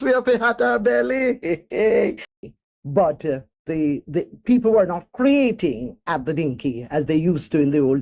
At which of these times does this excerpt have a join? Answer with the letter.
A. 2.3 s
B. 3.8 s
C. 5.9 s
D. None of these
A